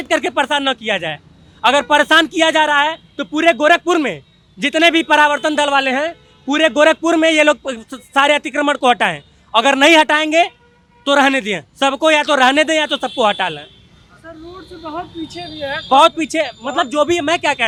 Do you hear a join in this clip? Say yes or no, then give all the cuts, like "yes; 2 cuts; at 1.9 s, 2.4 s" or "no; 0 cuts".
no; 0 cuts